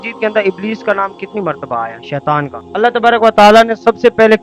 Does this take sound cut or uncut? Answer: cut